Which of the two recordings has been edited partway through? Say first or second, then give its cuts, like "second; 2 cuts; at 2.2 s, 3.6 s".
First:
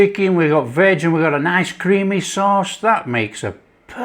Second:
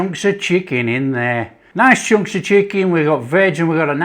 second; 1 cut; at 1.6 s